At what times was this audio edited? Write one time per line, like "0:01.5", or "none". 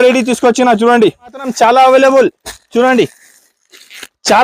0:01.5